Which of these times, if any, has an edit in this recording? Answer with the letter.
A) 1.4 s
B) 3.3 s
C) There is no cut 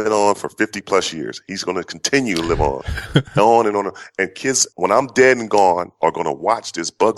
C